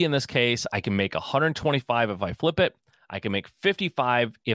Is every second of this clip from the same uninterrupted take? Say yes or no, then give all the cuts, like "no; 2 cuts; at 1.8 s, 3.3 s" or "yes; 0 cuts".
yes; 0 cuts